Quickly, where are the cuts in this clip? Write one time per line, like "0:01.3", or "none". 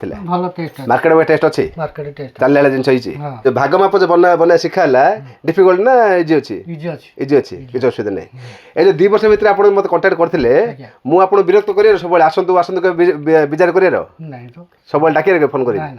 0:03.3